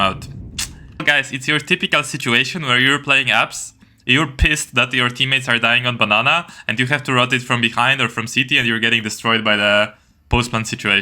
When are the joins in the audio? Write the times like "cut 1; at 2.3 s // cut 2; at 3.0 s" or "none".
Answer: cut 1; at 1.0 s